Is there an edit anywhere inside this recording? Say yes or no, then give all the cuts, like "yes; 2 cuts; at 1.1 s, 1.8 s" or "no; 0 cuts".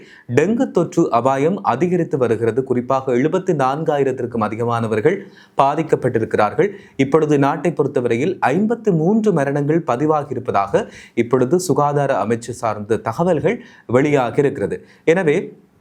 no; 0 cuts